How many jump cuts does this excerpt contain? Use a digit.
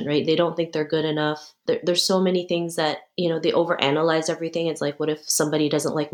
2